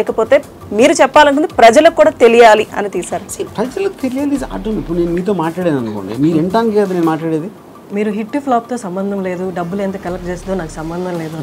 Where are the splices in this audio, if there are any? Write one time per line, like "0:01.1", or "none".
0:07.9